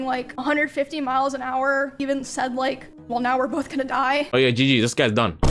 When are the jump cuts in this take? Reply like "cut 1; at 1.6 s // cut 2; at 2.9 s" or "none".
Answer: cut 1; at 2.0 s // cut 2; at 2.9 s // cut 3; at 4.3 s